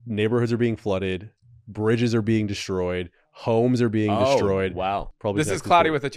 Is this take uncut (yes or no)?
no